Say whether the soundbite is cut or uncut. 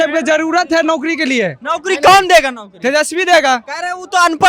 uncut